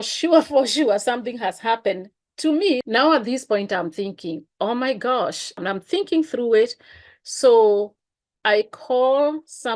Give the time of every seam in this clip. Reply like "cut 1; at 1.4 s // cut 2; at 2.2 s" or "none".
cut 1; at 2.8 s // cut 2; at 5.6 s